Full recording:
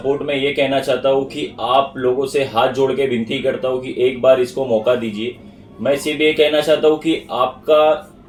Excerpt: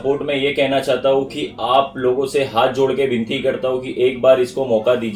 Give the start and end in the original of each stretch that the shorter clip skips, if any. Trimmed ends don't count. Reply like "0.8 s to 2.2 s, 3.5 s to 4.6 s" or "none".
none